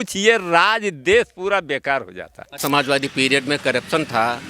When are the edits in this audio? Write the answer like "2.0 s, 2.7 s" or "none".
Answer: 2.6 s